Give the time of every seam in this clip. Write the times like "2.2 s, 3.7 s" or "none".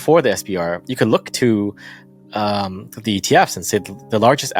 none